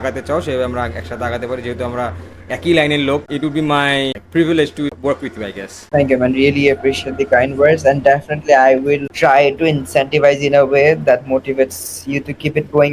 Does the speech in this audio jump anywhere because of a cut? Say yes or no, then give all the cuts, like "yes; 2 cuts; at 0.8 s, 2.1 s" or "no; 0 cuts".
yes; 2 cuts; at 3.3 s, 9.1 s